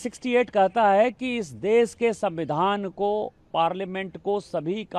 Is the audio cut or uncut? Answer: uncut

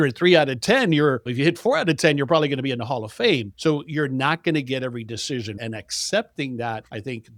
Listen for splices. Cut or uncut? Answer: uncut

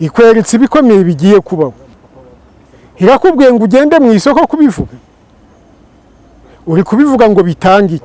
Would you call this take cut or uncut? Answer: uncut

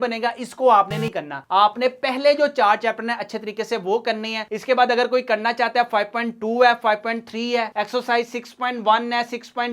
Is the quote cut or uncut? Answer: uncut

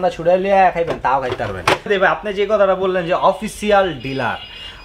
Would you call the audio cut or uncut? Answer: cut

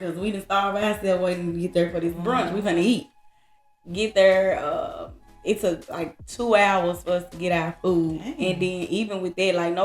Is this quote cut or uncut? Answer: uncut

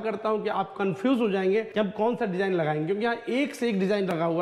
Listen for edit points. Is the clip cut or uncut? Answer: cut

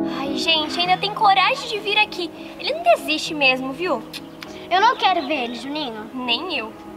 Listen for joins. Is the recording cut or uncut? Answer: uncut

